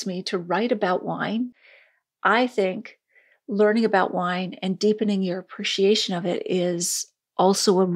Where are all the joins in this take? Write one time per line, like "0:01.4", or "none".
0:01.5